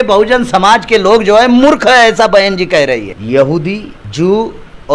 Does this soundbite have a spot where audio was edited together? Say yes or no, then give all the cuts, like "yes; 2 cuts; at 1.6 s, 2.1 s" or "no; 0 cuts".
yes; 1 cut; at 3.1 s